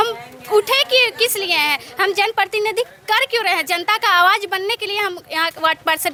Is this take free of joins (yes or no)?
yes